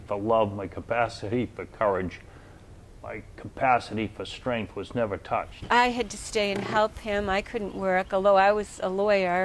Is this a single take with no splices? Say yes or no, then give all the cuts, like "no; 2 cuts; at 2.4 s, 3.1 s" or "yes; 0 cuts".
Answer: no; 1 cut; at 5.5 s